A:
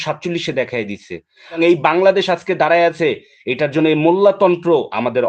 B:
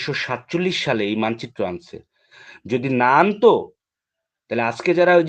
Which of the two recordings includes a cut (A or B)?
A